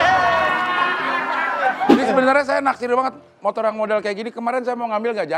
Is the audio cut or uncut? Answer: cut